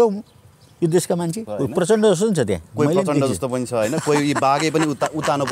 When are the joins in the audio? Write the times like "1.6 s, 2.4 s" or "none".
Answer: 1.4 s